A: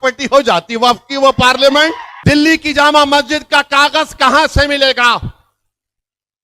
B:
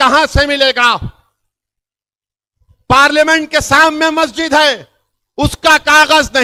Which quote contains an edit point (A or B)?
A